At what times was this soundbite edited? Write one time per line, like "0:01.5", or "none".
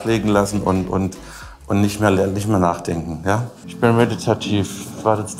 0:03.6